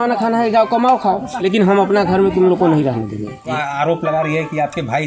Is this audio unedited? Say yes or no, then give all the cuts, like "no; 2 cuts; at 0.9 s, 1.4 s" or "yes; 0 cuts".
no; 2 cuts; at 1.3 s, 3.5 s